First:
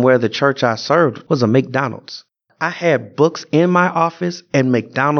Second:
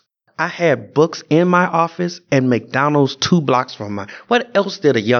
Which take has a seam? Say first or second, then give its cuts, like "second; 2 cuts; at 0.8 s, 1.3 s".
first; 1 cut; at 1.2 s